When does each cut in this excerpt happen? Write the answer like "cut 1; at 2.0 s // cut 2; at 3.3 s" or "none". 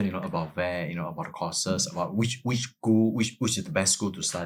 none